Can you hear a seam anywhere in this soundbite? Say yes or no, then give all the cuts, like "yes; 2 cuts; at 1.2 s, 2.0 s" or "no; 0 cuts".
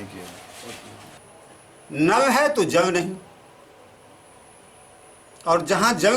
yes; 1 cut; at 1.2 s